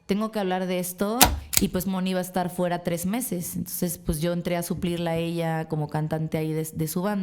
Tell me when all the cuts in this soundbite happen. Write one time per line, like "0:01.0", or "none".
0:01.4